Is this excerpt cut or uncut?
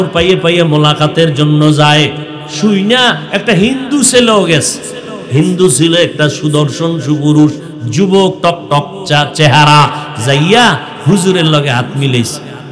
uncut